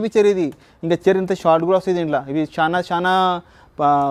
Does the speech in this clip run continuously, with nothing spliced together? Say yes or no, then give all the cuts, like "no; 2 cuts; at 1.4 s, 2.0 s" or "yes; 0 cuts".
yes; 0 cuts